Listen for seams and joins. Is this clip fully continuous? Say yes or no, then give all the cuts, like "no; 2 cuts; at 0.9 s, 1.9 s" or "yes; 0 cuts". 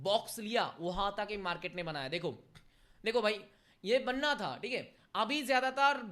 yes; 0 cuts